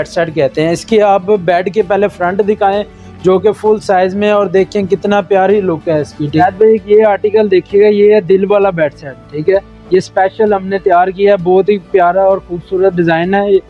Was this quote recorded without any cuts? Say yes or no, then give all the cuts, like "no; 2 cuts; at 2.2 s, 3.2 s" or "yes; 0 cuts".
no; 1 cut; at 6.4 s